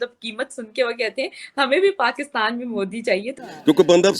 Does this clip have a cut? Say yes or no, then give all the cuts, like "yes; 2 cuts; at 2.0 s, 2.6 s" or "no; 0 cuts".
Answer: yes; 1 cut; at 3.3 s